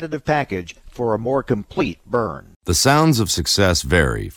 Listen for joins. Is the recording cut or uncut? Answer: cut